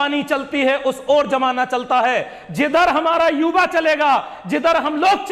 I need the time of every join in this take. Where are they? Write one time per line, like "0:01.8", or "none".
none